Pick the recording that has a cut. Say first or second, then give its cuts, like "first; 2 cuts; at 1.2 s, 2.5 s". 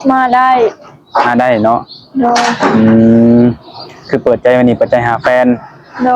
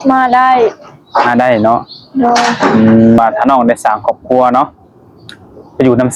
second; 1 cut; at 3.2 s